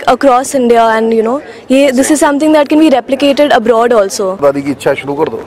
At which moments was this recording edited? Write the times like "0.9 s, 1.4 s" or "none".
4.4 s